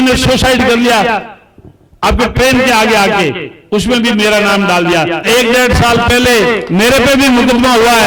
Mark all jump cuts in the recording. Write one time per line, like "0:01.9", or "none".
0:05.2